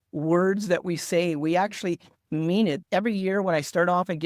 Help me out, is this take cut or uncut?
cut